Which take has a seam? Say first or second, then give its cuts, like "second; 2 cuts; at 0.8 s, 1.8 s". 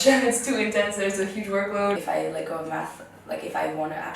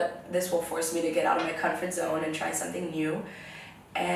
first; 1 cut; at 2.0 s